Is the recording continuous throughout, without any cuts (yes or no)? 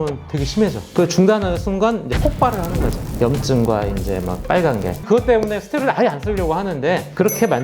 no